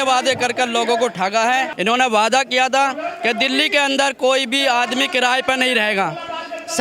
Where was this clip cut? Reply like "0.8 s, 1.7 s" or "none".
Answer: 1.7 s